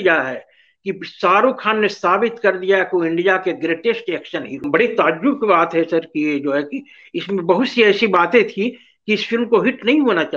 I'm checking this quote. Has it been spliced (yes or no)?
yes